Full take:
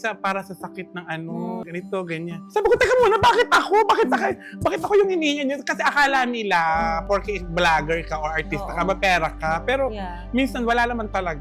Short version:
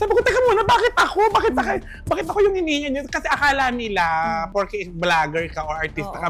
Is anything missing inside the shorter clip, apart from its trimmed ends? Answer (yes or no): no